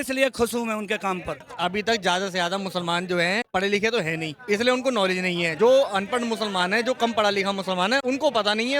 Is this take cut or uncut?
cut